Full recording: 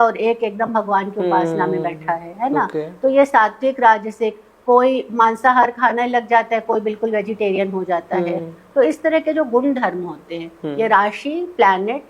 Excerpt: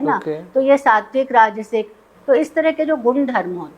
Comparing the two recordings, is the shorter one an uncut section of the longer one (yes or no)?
no